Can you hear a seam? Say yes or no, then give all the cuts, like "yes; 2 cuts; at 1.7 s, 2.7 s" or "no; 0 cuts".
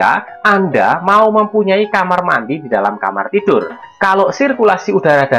yes; 1 cut; at 3.8 s